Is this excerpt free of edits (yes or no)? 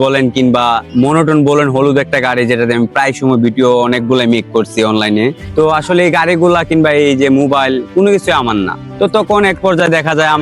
no